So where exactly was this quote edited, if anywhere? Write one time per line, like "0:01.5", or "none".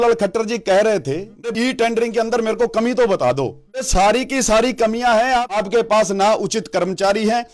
0:01.4
0:03.9
0:05.6